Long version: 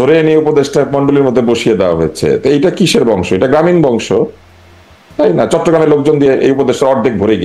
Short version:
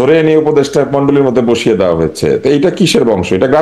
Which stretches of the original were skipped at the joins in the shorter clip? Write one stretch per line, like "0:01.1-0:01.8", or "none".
none

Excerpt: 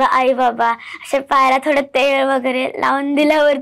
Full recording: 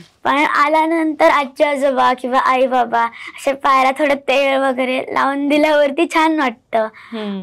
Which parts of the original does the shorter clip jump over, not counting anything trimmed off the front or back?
none

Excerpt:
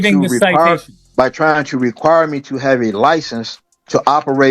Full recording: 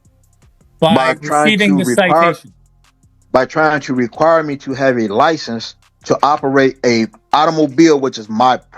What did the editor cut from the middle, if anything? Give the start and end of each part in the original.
0:02.5-0:03.1

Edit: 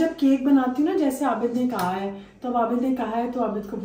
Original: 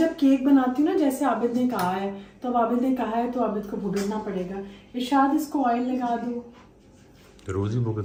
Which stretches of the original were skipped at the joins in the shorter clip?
none

